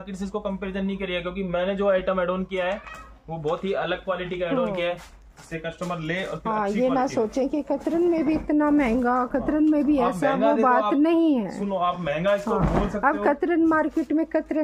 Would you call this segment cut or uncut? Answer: uncut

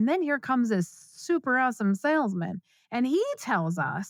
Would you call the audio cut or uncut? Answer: uncut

